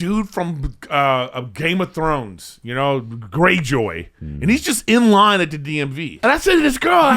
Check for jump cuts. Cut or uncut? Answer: cut